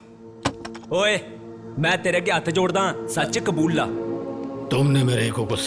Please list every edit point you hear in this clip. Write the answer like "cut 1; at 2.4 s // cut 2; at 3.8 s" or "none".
cut 1; at 4.2 s